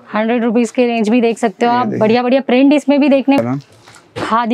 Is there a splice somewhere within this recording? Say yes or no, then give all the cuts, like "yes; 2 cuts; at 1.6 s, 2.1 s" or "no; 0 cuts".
yes; 1 cut; at 3.4 s